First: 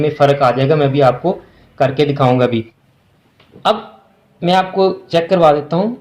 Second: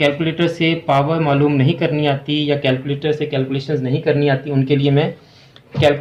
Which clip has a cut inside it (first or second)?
first